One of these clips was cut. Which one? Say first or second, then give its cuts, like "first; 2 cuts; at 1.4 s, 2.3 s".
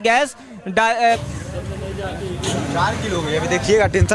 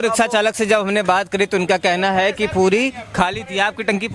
first; 1 cut; at 1.2 s